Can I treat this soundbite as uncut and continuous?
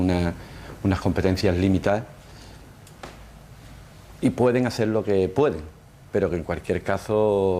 yes; 0 cuts

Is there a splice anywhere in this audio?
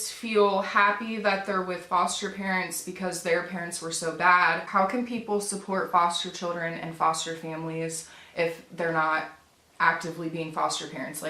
yes; 1 cut; at 4.6 s

